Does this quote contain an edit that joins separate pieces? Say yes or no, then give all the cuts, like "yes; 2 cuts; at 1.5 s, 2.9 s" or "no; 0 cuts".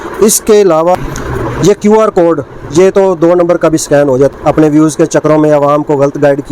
yes; 2 cuts; at 1.0 s, 4.3 s